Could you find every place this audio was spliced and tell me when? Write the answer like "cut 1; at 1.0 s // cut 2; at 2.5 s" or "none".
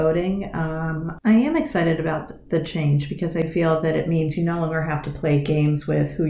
cut 1; at 1.2 s